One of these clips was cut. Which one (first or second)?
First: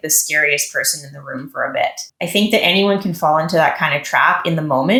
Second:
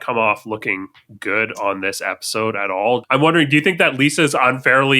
second